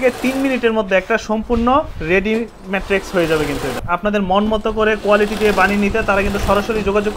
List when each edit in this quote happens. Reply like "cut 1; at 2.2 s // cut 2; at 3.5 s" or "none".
cut 1; at 3.8 s